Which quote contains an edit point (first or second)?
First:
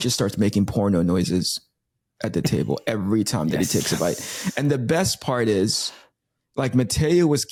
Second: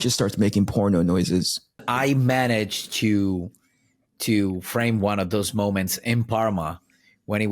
second